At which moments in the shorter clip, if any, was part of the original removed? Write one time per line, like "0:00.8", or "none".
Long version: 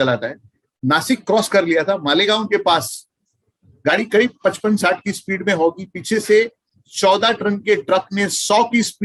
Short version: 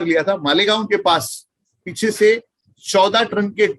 0:01.8